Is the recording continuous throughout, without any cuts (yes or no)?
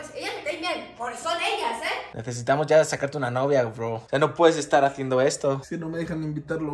no